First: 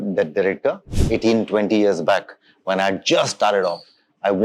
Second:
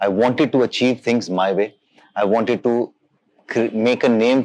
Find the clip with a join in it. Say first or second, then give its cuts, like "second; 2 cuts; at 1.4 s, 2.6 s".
first; 1 cut; at 0.9 s